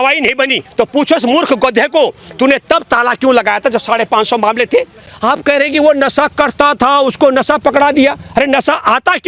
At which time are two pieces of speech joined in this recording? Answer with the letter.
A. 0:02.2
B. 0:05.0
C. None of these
B